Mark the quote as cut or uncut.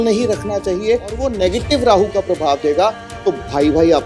cut